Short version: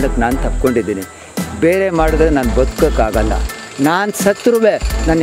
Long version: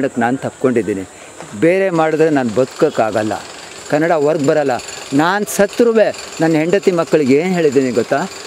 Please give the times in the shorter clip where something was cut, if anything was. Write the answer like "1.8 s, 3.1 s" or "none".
3.6 s